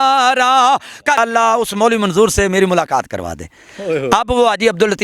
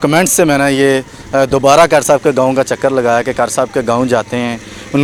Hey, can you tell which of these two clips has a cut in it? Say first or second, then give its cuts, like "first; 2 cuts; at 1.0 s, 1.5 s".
first; 1 cut; at 1.2 s